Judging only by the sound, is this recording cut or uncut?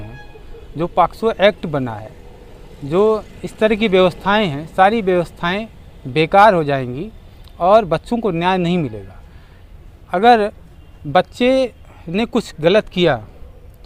uncut